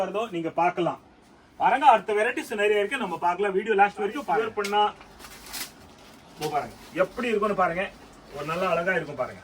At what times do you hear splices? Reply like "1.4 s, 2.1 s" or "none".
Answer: 4.4 s